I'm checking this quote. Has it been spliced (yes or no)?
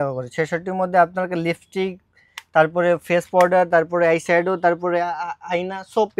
no